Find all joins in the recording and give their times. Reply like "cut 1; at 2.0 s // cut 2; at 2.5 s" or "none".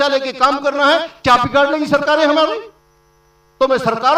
none